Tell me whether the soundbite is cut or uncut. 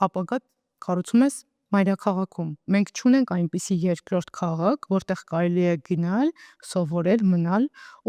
cut